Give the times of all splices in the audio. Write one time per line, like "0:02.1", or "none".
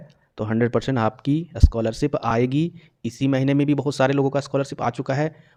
none